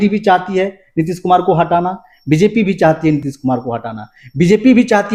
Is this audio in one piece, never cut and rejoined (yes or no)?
yes